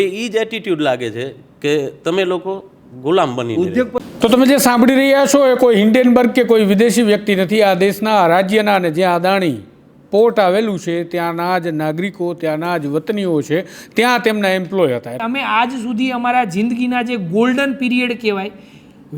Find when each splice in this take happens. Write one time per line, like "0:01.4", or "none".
0:04.0
0:15.1